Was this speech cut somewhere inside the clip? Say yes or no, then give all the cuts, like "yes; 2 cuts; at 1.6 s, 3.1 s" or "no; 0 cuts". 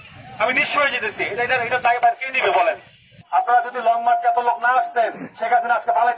yes; 1 cut; at 3.1 s